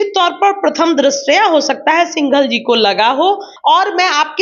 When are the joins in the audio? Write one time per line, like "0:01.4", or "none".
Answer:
0:03.5